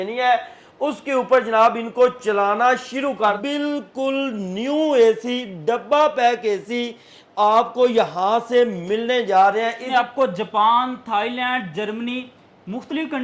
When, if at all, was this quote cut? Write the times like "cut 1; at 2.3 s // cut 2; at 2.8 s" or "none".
cut 1; at 3.4 s // cut 2; at 9.8 s